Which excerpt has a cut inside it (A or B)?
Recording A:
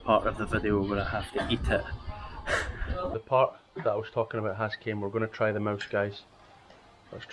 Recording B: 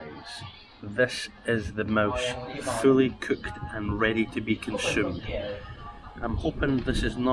A